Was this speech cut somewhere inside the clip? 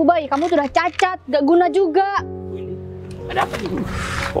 no; 0 cuts

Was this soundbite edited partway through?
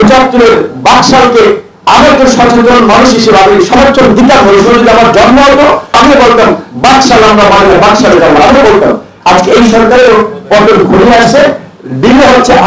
yes; 2 cuts; at 6.0 s, 9.1 s

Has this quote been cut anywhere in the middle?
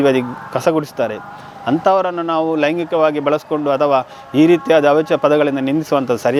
no; 0 cuts

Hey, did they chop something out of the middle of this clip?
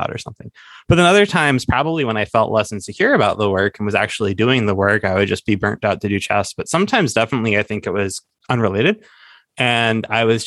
no; 0 cuts

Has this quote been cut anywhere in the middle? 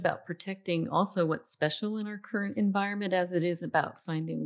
no; 0 cuts

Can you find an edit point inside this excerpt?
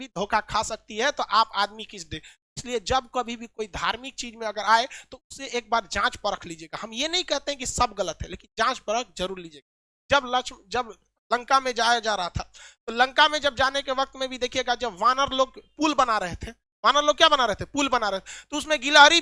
no; 0 cuts

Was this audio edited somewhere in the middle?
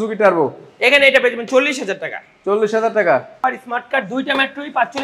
yes; 1 cut; at 3.4 s

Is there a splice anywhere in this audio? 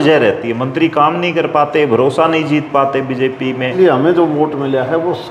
yes; 1 cut; at 3.7 s

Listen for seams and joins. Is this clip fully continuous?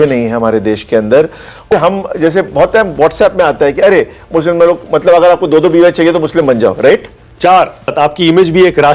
no; 2 cuts; at 1.7 s, 7.9 s

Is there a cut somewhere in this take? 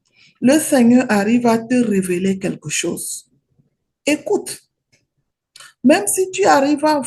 no; 0 cuts

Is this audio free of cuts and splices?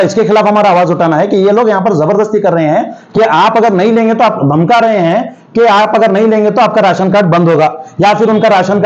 yes; 0 cuts

